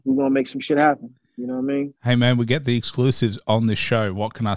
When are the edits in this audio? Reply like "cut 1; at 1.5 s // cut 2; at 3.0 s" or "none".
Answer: cut 1; at 2.0 s